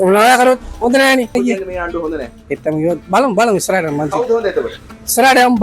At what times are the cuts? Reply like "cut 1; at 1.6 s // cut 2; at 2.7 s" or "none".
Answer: cut 1; at 1.3 s